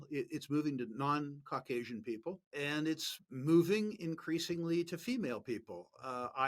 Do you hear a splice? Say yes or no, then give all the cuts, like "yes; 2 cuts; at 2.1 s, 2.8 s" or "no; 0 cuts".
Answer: yes; 1 cut; at 2.5 s